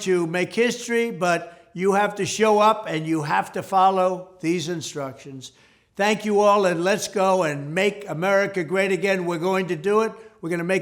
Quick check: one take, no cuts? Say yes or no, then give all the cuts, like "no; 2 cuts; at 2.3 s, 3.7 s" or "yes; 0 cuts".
yes; 0 cuts